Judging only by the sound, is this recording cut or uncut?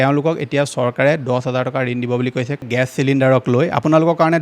cut